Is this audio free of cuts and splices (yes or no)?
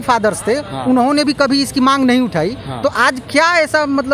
yes